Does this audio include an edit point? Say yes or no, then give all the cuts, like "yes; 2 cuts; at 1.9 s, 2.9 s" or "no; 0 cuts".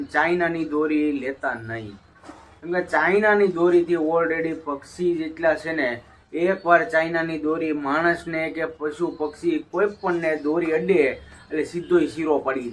no; 0 cuts